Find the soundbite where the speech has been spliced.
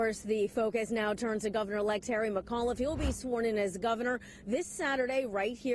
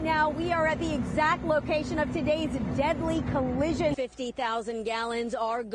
second; 1 cut; at 4.0 s

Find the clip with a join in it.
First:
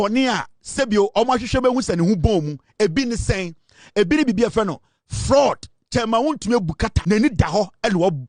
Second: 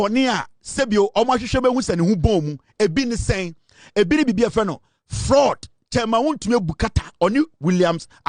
first; 1 cut; at 6.9 s

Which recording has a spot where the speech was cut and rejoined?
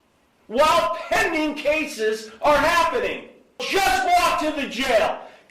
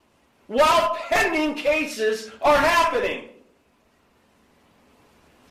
first; 1 cut; at 3.7 s

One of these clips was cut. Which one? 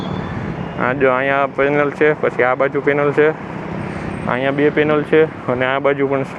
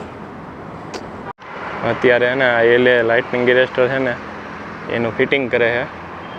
second; 1 cut; at 1.4 s

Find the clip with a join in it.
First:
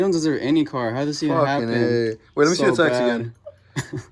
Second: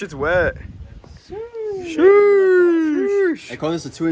second; 1 cut; at 3.1 s

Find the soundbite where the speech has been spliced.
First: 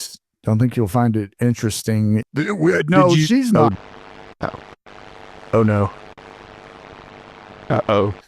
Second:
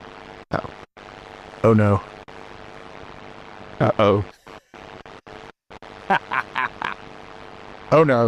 first; 1 cut; at 2.2 s

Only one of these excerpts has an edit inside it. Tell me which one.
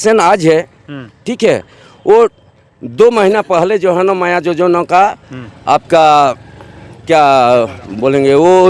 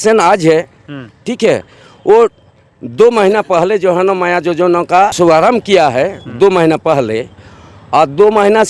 second; 1 cut; at 5.2 s

